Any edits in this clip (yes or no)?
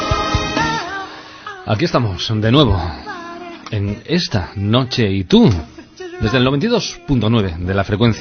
yes